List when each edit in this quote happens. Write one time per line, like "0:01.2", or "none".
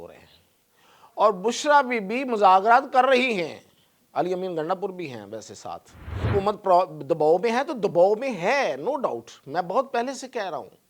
0:06.3

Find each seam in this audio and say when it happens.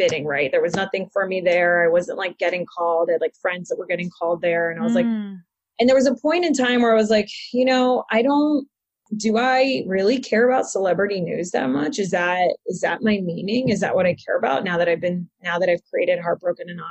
0:09.1

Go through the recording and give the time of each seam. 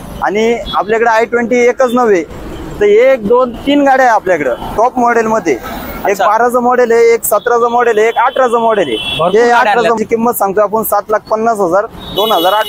0:10.0

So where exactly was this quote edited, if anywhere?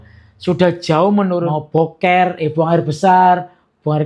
0:01.6

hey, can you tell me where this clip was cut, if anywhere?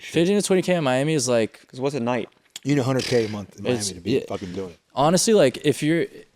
none

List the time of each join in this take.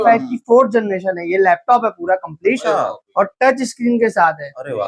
none

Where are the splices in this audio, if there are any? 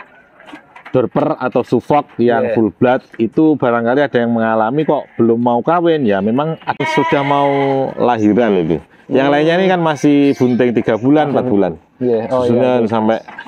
0:06.8

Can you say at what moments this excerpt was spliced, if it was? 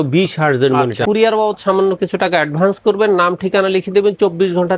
0:01.0

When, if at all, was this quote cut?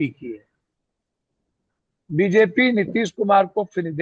none

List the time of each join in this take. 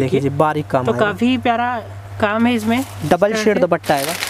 none

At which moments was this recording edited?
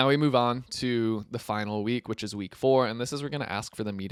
none

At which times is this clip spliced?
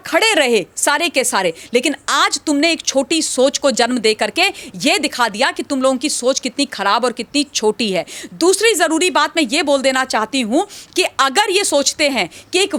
none

